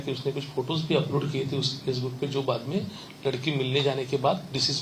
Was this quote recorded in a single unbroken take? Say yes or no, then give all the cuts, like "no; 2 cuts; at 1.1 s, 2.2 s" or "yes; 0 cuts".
yes; 0 cuts